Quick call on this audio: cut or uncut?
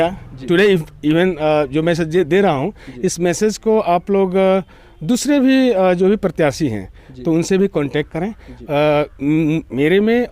uncut